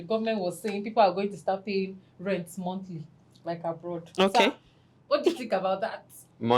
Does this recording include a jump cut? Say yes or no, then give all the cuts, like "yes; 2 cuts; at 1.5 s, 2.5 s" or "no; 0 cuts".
no; 0 cuts